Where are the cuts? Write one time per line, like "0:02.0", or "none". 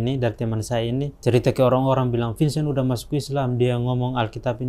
0:01.1